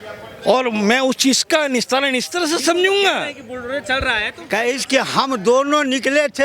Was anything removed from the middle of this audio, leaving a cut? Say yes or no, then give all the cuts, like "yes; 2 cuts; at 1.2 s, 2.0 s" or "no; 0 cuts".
yes; 1 cut; at 4.4 s